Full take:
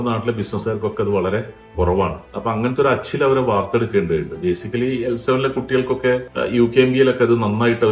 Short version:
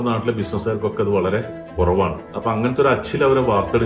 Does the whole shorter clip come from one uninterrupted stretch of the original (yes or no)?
yes